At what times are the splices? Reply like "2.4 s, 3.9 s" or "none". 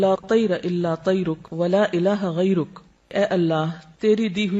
1.4 s, 3.1 s